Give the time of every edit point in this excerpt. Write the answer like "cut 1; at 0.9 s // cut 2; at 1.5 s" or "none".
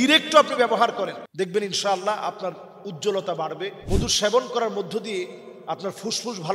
cut 1; at 1.2 s // cut 2; at 3.8 s